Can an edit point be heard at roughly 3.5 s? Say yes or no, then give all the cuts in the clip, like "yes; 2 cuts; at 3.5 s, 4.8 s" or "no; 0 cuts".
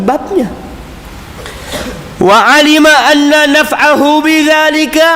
no; 1 cut; at 1.0 s